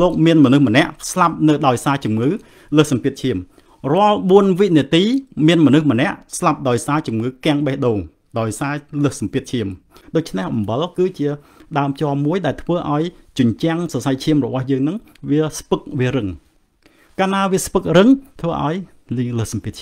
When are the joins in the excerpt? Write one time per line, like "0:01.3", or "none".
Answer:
0:09.9